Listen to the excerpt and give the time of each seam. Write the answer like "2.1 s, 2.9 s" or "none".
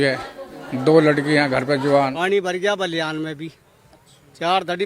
2.1 s